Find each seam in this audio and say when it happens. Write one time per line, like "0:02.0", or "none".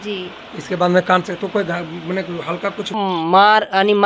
0:03.0